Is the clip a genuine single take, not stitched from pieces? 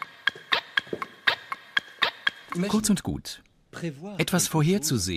yes; 0 cuts

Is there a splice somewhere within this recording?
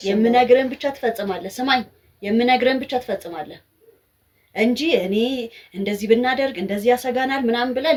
no; 0 cuts

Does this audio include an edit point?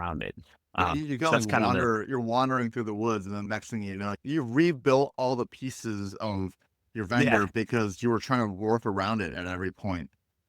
yes; 1 cut; at 3.8 s

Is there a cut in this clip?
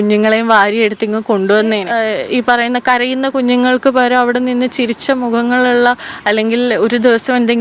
yes; 1 cut; at 1.9 s

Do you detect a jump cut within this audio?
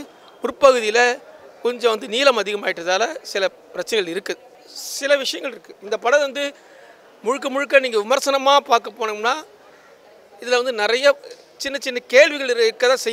yes; 1 cut; at 4.4 s

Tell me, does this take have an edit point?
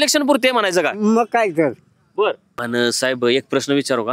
yes; 1 cut; at 2.5 s

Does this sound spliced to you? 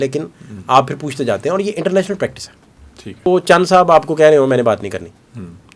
yes; 1 cut; at 3.3 s

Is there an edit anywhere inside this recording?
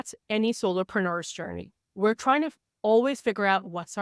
no; 0 cuts

